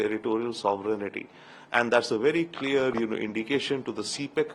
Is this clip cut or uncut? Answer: uncut